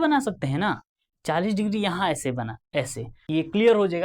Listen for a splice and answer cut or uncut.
cut